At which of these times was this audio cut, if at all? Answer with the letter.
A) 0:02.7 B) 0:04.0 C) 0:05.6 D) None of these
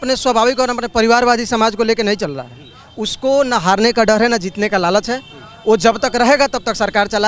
D